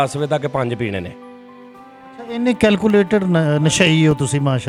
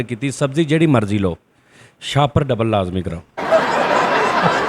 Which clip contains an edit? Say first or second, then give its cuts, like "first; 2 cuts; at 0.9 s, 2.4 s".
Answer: second; 1 cut; at 3.2 s